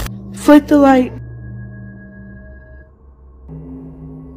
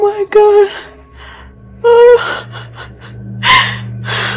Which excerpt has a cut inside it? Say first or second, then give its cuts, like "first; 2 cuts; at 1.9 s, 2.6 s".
first; 1 cut; at 2.8 s